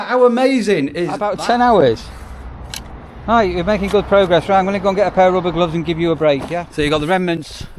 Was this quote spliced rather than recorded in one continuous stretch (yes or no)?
yes